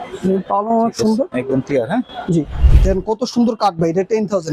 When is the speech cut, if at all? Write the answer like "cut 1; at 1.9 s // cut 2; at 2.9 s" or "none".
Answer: cut 1; at 2.6 s